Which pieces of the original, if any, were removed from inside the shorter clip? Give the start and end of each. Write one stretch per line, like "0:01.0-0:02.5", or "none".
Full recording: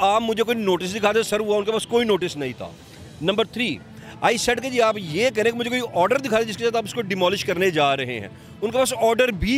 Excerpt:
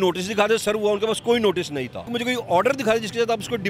0:02.8-0:05.6

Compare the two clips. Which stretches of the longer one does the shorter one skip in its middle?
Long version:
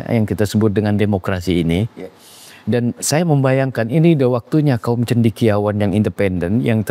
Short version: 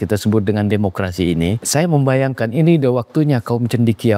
0:01.9-0:03.0

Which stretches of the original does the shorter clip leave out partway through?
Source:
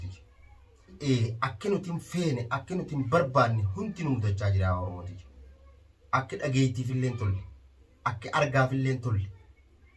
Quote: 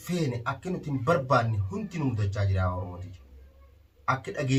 none

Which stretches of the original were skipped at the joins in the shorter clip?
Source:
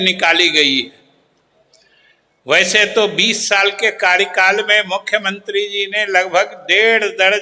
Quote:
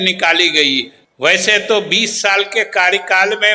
0:01.0-0:02.3

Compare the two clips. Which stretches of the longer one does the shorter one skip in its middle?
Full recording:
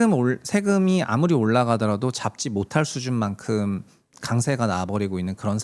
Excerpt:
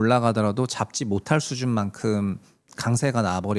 none

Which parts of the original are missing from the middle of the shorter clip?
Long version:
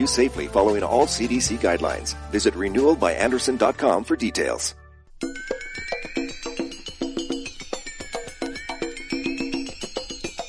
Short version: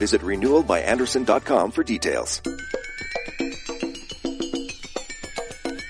0:04.7-0:05.1

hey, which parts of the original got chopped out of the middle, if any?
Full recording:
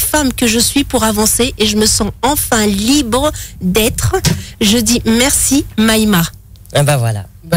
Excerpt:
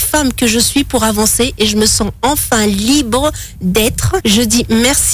0:04.2-0:04.6

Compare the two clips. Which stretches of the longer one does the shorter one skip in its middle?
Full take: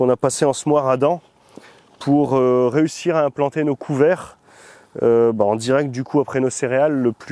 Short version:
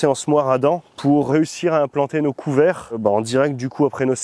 0:01.7-0:02.7
0:04.4-0:05.3

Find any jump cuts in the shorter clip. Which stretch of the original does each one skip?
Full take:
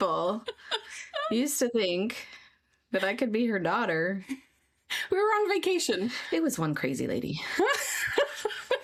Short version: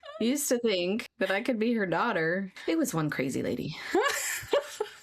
0:02.2-0:02.8
0:04.3-0:06.2

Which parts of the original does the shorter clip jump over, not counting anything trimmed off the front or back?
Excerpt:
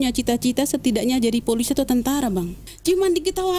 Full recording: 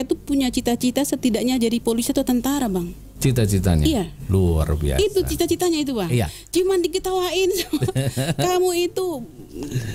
0:03.1-0:06.4

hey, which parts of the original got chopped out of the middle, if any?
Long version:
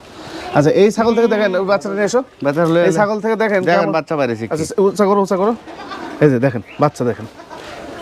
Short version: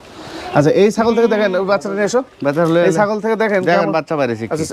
none

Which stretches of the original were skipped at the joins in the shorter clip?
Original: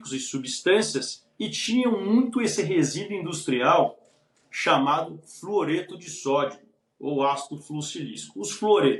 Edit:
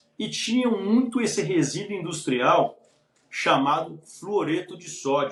none

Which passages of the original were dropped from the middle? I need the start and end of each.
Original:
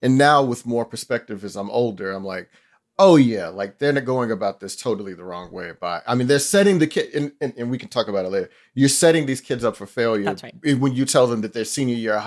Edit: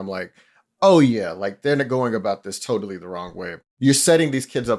0:05.8-0:08.5

